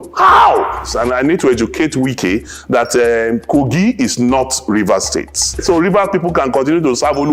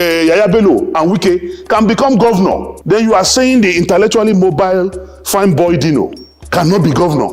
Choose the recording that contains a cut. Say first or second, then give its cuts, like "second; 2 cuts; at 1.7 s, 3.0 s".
first; 2 cuts; at 0.9 s, 5.6 s